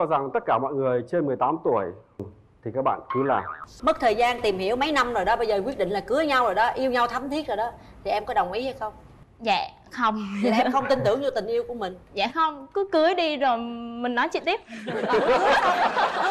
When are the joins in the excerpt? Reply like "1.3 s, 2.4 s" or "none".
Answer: 2.2 s, 3.6 s